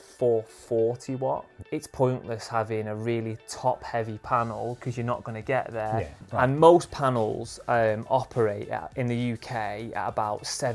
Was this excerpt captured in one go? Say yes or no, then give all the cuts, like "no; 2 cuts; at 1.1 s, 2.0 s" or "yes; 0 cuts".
no; 2 cuts; at 1.6 s, 6.2 s